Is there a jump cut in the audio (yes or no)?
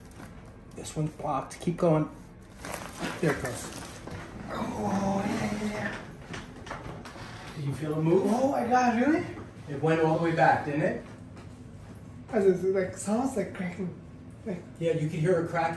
no